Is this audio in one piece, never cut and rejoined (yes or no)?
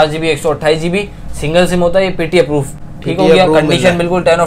yes